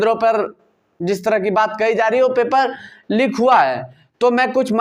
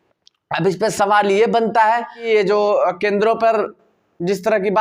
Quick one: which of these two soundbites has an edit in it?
second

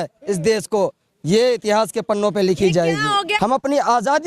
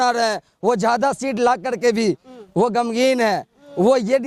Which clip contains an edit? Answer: first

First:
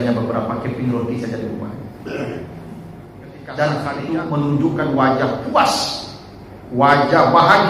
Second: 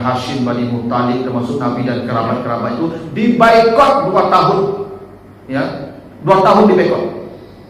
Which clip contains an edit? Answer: first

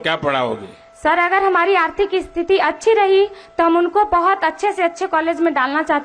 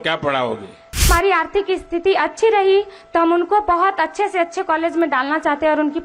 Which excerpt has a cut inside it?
second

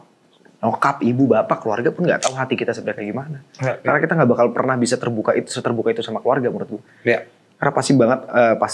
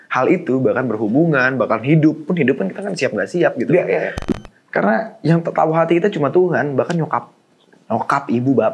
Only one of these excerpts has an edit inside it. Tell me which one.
second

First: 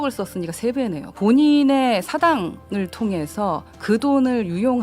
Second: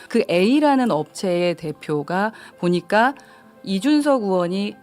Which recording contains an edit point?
first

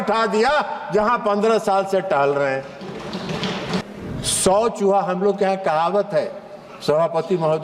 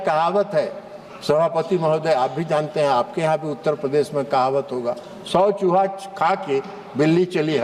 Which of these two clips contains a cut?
first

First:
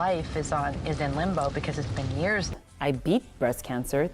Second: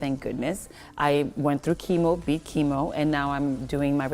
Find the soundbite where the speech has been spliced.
first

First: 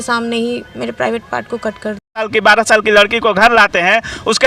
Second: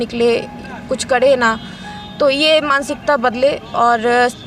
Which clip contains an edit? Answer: first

